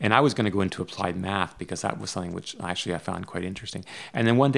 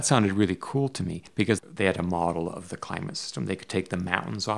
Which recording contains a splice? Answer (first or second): second